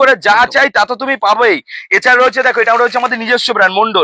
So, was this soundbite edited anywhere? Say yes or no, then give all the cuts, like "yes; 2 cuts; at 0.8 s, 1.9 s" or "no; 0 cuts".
no; 0 cuts